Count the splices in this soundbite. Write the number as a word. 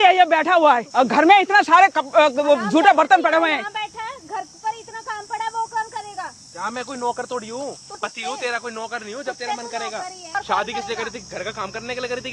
three